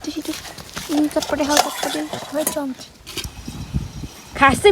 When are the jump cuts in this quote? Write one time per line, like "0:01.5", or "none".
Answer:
0:03.3